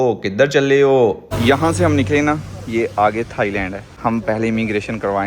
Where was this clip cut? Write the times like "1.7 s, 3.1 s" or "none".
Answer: 1.3 s, 3.9 s